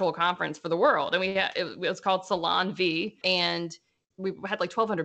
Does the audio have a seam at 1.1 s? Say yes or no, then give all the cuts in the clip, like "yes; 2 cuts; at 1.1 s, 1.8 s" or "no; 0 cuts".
no; 0 cuts